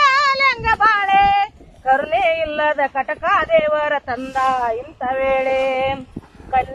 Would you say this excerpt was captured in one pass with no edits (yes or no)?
yes